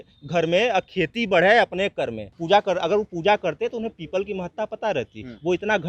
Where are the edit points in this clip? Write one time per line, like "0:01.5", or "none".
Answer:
0:02.3